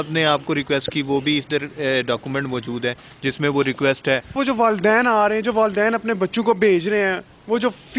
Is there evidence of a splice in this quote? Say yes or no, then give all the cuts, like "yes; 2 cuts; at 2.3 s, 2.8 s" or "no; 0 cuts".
yes; 1 cut; at 4.4 s